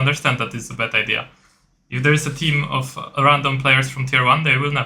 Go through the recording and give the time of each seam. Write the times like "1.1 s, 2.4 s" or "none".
none